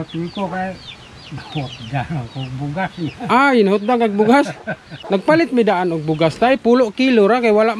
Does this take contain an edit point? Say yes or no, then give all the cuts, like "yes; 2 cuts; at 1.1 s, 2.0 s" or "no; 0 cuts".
no; 0 cuts